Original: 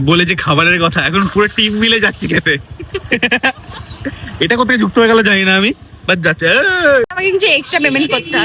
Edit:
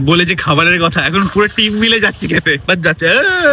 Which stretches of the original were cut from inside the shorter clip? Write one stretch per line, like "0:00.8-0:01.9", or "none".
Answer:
0:02.6-0:06.0